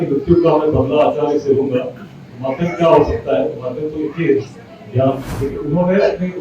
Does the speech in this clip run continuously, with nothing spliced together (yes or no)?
no